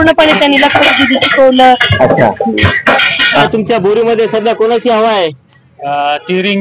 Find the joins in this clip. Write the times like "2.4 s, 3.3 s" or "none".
3.4 s

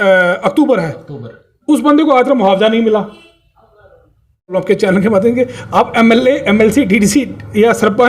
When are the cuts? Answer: 4.5 s

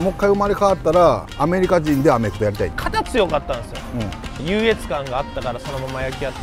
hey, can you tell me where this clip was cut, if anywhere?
2.7 s, 4.3 s

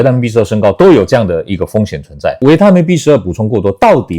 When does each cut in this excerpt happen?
2.3 s

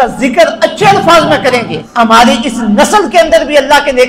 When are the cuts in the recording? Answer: 1.8 s

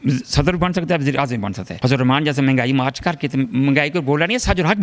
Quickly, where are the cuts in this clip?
1.6 s

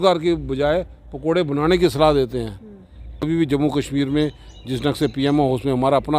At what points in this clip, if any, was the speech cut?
3.3 s

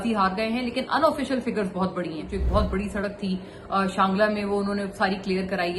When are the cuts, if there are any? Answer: 2.3 s

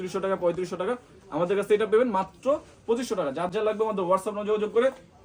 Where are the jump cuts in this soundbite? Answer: none

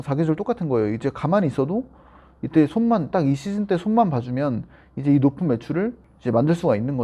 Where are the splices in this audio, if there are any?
6.1 s

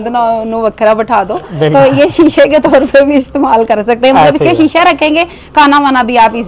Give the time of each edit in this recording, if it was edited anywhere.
none

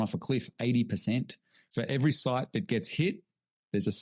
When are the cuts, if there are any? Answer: 1.6 s

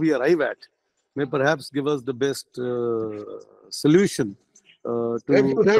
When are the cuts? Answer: none

